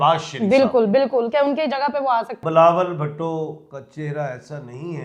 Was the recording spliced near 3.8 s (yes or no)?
no